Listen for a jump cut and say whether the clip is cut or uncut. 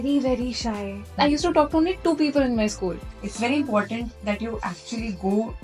cut